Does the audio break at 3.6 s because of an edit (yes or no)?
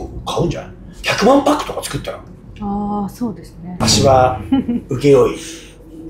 yes